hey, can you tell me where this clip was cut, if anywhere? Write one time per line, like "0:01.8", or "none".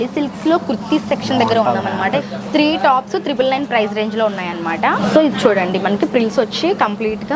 0:02.3
0:05.0